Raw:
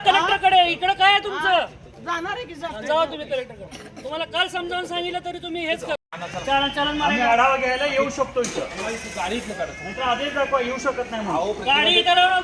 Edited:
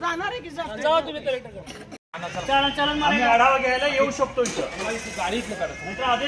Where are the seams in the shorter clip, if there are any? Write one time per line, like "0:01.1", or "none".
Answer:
0:02.0